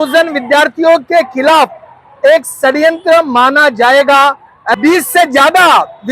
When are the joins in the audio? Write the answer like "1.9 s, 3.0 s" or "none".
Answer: 4.7 s